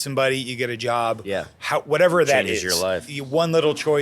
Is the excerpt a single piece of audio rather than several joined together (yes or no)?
no